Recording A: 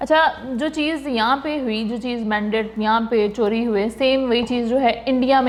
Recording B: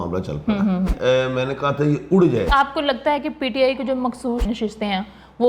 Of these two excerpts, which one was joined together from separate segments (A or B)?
B